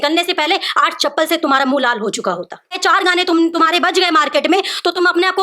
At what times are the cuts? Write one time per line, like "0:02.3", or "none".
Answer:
0:02.8